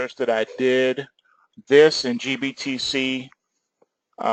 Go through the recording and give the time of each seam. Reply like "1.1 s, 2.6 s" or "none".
3.0 s